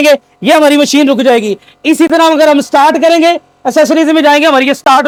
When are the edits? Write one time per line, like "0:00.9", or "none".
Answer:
none